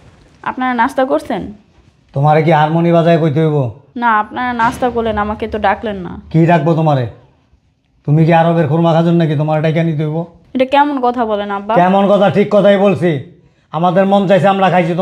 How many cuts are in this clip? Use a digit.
2